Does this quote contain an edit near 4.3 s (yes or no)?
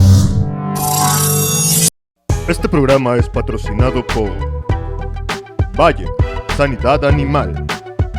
no